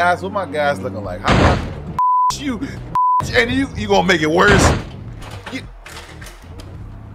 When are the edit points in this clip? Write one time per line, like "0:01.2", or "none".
none